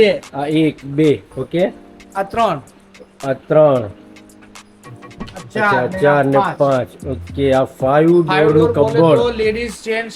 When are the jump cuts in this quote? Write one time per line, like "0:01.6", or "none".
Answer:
none